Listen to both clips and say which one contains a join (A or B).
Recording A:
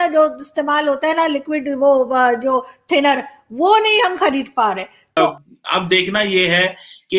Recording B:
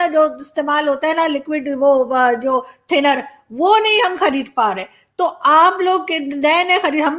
A